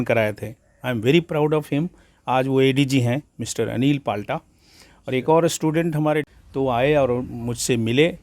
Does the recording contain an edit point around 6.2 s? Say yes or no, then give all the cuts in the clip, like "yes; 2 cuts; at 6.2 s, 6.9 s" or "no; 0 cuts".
yes; 1 cut; at 6.2 s